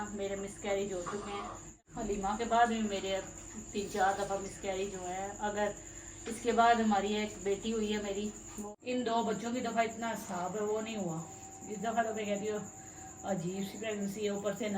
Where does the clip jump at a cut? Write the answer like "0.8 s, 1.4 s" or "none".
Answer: 1.7 s, 8.5 s